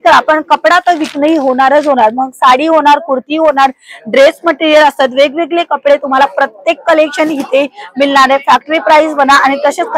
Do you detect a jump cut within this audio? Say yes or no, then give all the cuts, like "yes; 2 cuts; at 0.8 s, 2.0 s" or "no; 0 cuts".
no; 0 cuts